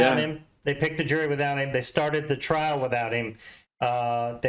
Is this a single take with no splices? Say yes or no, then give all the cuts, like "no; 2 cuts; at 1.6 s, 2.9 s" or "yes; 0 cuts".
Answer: yes; 0 cuts